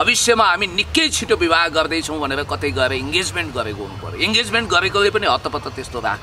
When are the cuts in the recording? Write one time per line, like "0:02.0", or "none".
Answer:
none